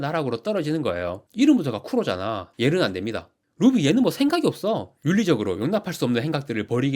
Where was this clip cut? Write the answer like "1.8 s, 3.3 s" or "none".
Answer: 3.4 s, 4.9 s